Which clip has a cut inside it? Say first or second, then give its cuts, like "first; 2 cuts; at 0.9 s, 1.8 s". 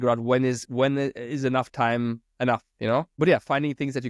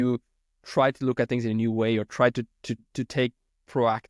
first; 1 cut; at 3.1 s